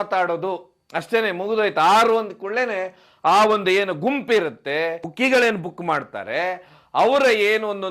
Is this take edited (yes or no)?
yes